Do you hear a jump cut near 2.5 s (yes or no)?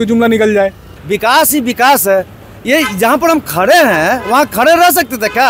no